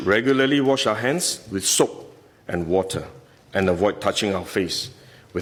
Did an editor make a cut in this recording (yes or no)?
no